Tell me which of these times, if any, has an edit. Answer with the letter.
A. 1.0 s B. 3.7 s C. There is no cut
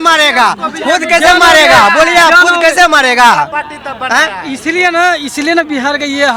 C